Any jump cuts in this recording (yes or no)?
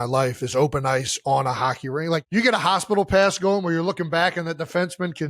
yes